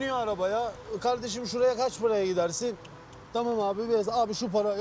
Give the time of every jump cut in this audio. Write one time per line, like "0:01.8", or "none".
none

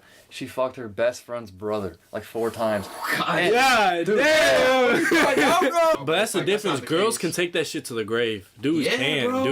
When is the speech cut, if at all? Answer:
0:06.0

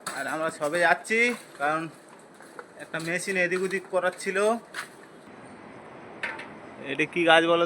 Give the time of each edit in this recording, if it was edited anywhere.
0:05.3

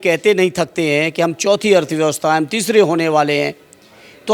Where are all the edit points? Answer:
none

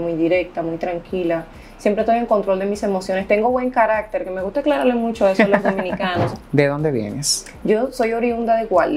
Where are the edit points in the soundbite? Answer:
0:06.4

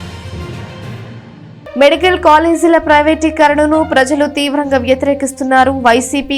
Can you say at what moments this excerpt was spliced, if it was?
0:01.1

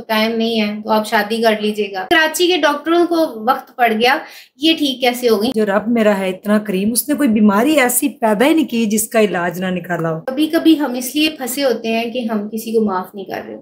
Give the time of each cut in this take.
0:02.0
0:05.5
0:10.2

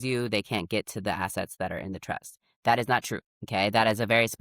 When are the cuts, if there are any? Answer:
0:03.3

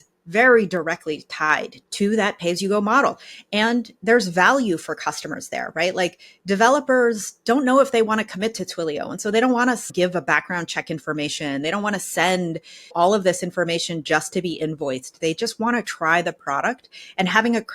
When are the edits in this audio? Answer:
0:01.8
0:09.9
0:12.9

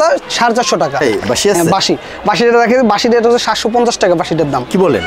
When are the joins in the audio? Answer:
0:01.0

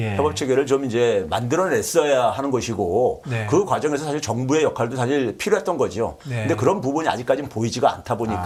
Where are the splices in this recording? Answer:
none

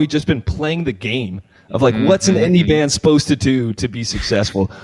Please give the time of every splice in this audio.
none

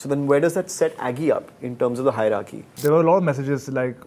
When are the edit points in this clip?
0:02.8

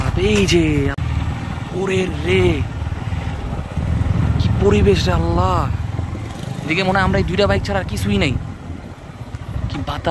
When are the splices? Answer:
0:01.0

